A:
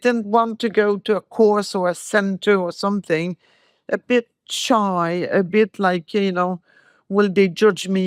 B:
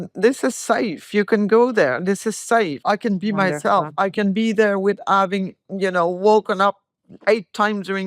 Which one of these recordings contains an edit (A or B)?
B